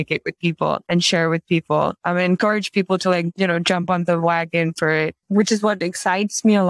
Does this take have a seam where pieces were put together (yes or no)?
yes